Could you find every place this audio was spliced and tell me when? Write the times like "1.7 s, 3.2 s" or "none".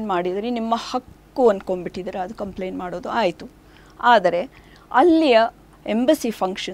none